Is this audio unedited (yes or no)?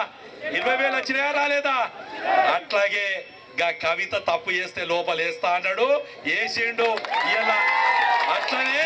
yes